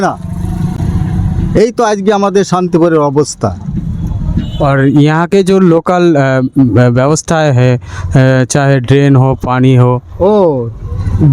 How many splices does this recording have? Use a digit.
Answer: 0